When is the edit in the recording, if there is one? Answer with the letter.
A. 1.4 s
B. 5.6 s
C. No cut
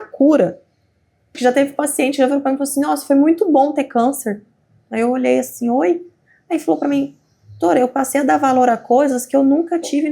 A